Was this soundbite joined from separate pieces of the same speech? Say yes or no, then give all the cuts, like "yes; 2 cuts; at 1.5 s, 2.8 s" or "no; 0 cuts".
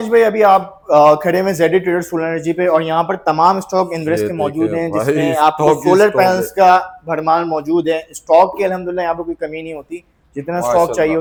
no; 0 cuts